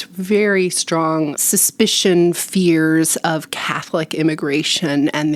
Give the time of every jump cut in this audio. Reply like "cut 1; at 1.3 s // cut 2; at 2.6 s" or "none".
cut 1; at 1.4 s